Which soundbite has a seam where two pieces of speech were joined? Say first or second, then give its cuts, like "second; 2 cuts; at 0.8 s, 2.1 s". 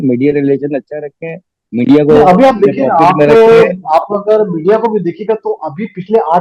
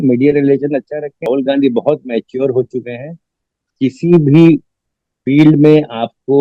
second; 1 cut; at 1.2 s